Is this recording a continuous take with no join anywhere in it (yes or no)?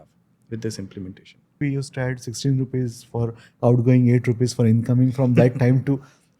no